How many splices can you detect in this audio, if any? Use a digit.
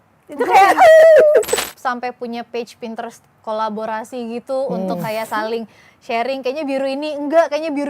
1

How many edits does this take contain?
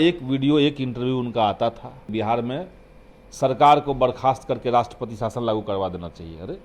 1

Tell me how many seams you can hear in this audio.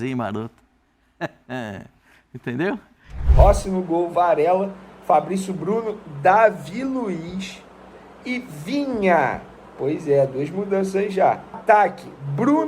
2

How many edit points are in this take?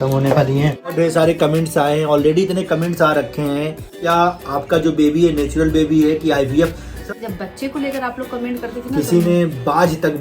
3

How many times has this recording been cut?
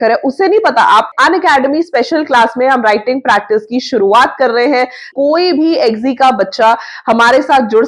2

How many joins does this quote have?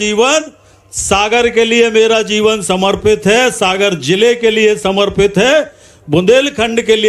0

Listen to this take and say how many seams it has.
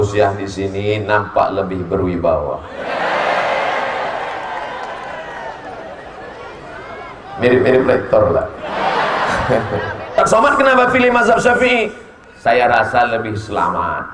1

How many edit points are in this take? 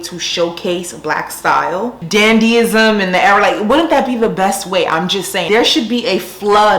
1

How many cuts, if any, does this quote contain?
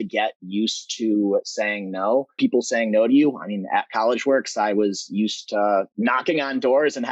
2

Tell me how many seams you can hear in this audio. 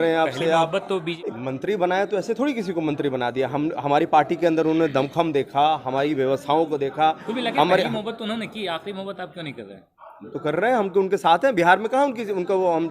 1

